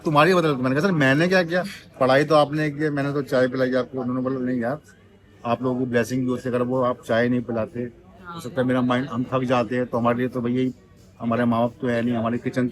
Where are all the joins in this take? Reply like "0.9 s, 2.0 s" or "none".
none